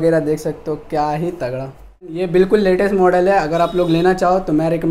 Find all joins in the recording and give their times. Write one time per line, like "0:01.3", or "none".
0:02.2